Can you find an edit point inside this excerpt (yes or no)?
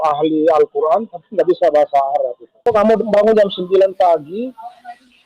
yes